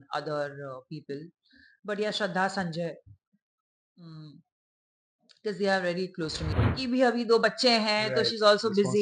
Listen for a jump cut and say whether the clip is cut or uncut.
cut